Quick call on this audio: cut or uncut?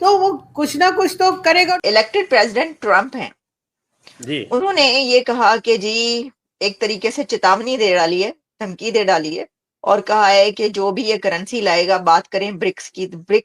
cut